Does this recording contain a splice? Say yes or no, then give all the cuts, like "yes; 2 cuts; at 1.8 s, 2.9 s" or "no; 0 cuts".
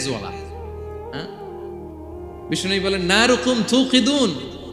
no; 0 cuts